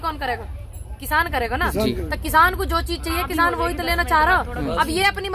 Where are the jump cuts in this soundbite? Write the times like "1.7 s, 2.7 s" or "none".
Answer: none